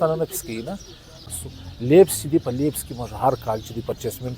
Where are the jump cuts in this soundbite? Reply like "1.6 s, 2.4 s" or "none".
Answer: 1.3 s